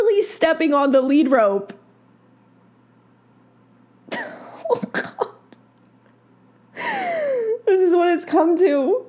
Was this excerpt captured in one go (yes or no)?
yes